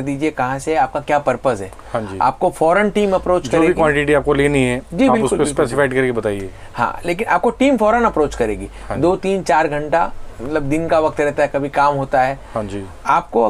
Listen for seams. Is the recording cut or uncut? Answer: uncut